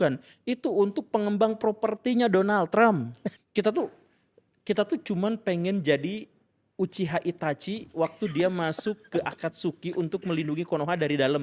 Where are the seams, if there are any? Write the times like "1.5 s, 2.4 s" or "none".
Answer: 3.2 s, 5.7 s